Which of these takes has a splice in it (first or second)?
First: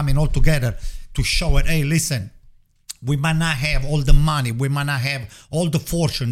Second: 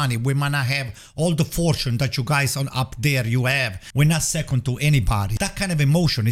second